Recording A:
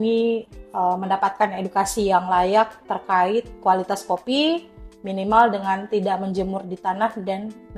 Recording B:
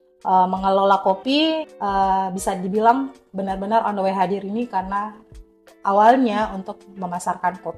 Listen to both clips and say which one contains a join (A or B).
B